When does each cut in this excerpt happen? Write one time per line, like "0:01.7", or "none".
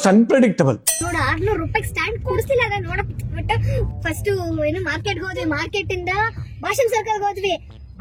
0:01.0
0:03.9